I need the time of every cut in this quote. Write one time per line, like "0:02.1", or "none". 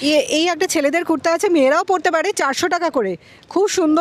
none